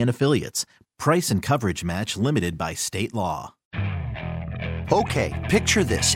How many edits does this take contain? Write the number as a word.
one